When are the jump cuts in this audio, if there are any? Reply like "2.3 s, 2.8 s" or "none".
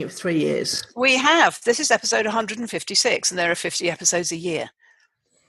none